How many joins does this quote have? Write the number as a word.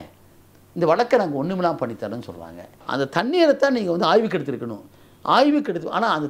one